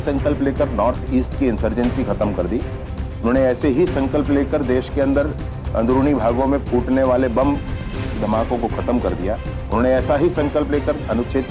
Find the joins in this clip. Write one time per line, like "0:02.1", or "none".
none